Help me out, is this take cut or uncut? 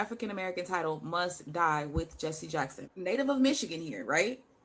uncut